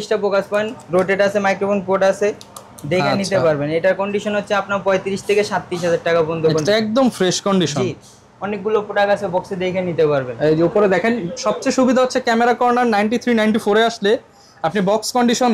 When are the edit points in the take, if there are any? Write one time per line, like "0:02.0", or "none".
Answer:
none